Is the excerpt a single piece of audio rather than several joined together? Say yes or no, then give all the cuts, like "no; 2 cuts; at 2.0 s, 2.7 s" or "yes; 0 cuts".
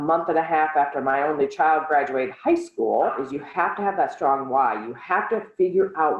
no; 1 cut; at 3.2 s